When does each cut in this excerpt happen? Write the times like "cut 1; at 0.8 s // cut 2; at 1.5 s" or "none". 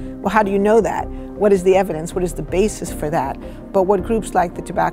none

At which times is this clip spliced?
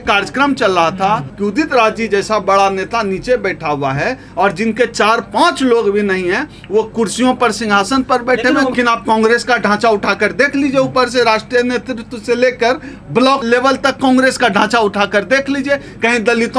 cut 1; at 1.3 s // cut 2; at 8.7 s // cut 3; at 13.4 s

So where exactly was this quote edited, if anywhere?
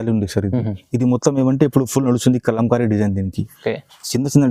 none

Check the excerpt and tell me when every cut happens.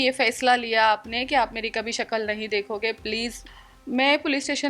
cut 1; at 3.4 s

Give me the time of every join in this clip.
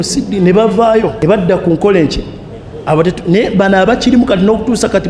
cut 1; at 1.2 s

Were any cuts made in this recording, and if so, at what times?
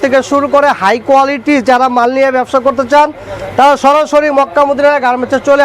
none

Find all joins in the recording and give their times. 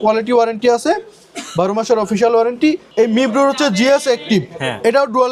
cut 1; at 2.9 s

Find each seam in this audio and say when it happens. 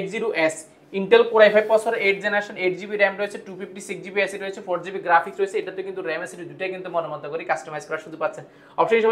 none

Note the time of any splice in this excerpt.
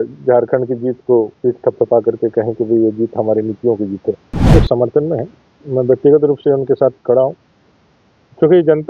cut 1; at 4.5 s

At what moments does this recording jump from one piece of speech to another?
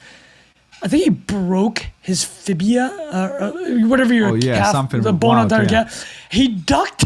none

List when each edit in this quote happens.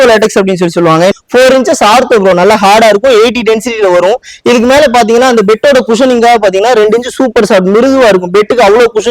cut 1; at 1.1 s

